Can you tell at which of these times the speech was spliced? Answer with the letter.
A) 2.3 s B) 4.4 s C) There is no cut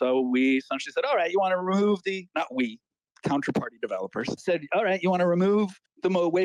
B